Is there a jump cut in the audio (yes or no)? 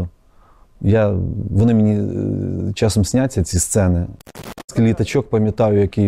yes